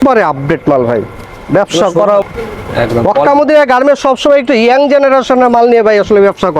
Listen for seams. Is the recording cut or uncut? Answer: cut